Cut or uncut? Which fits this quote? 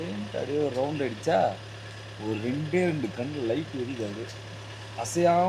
uncut